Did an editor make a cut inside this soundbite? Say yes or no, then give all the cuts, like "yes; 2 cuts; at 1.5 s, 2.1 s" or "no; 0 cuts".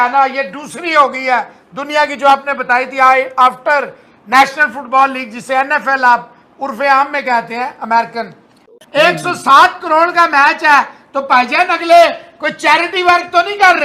yes; 1 cut; at 8.7 s